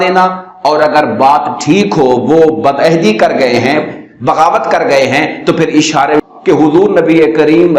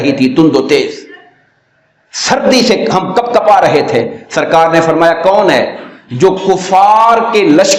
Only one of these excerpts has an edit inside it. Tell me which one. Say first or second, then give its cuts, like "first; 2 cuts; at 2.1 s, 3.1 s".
first; 1 cut; at 6.2 s